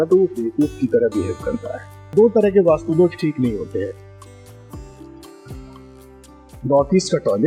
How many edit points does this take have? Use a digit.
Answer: 1